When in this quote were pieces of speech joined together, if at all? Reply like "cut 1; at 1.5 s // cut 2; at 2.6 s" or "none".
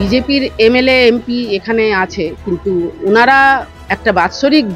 cut 1; at 3.7 s